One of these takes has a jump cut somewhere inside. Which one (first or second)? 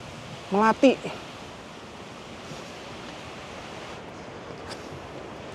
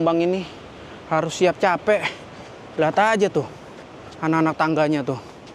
first